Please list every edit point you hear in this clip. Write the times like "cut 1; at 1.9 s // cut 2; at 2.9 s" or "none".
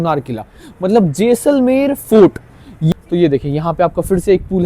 cut 1; at 2.8 s